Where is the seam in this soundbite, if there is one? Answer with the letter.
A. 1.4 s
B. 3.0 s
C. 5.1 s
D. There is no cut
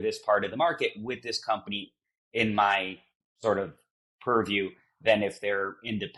D